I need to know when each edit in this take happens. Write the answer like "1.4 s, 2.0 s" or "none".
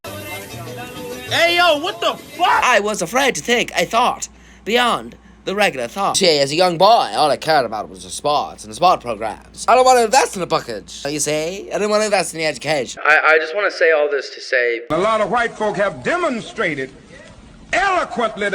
2.6 s, 6.1 s, 9.6 s, 11.1 s, 13.0 s